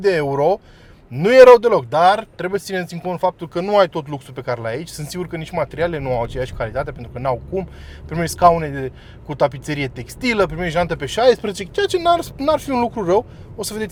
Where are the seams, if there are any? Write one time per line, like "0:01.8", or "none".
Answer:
none